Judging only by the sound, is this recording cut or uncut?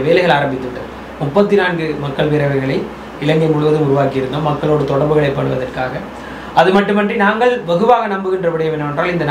uncut